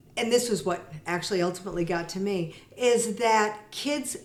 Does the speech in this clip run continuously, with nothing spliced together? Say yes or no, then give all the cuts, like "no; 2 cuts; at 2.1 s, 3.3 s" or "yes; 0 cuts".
yes; 0 cuts